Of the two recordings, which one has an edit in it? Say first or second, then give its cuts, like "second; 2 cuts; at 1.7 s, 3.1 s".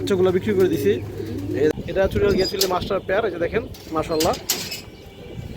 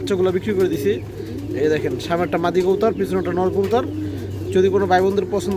first; 1 cut; at 1.7 s